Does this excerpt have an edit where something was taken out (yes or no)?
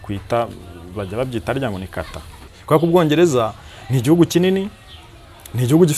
yes